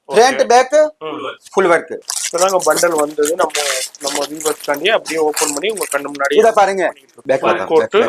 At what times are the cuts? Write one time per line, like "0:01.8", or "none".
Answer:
0:02.0
0:07.1

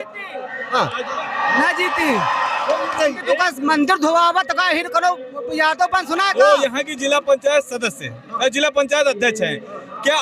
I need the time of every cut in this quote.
0:03.2
0:06.3

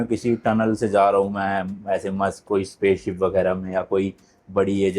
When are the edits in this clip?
none

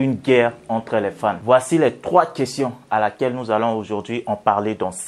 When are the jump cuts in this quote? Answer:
0:01.4

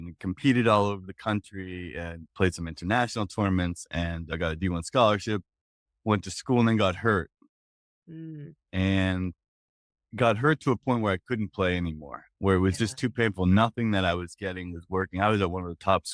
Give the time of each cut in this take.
none

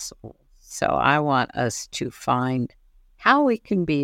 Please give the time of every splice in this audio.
none

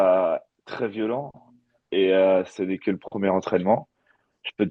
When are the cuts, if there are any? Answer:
none

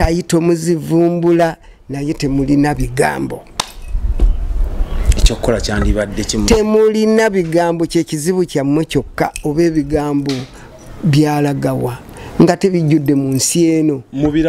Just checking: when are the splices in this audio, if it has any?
none

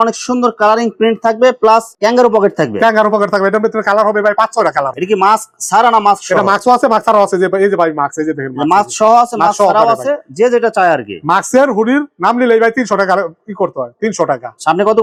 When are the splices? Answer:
none

